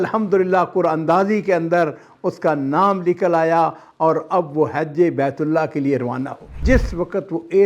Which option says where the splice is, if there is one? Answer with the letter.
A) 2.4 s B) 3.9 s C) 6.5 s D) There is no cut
C